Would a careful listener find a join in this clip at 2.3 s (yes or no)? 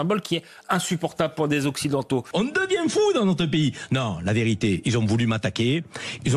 yes